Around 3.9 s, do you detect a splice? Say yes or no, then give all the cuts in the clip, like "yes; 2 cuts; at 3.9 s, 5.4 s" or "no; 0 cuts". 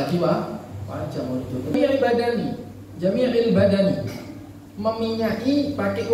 no; 1 cut; at 1.8 s